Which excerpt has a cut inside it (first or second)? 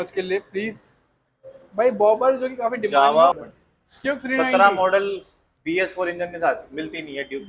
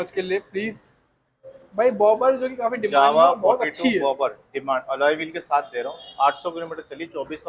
first